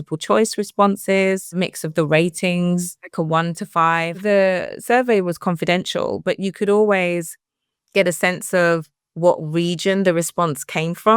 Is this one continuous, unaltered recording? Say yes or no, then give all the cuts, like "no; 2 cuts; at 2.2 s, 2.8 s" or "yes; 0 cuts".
no; 3 cuts; at 1.6 s, 3.0 s, 4.2 s